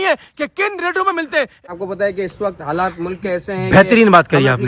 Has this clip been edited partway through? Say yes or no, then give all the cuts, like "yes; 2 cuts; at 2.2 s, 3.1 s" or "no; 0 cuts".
yes; 1 cut; at 1.6 s